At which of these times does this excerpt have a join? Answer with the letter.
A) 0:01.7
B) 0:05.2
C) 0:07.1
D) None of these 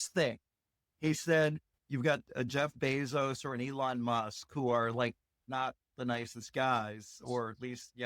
A